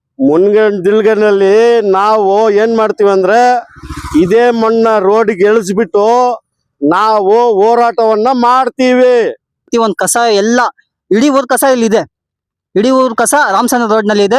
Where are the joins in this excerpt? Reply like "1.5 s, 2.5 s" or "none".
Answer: 9.6 s